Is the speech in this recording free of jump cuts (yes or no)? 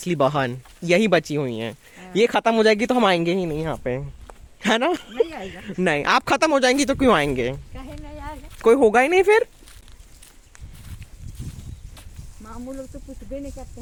yes